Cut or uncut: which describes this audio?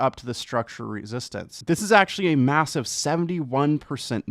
cut